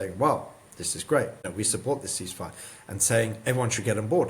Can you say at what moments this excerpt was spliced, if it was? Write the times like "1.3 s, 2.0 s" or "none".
1.4 s